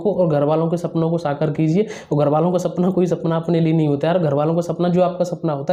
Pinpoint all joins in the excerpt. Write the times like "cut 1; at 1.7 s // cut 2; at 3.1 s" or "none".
none